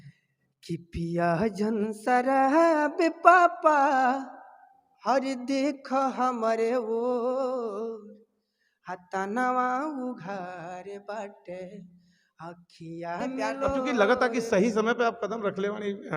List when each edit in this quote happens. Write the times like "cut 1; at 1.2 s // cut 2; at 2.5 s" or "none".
cut 1; at 13.8 s